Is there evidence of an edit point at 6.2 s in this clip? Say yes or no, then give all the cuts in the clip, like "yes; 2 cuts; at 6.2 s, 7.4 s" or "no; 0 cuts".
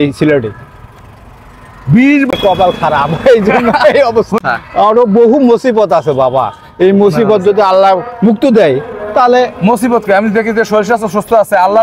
no; 2 cuts; at 2.3 s, 4.4 s